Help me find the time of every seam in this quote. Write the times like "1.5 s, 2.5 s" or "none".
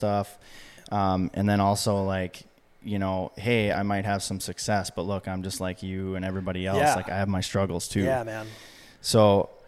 none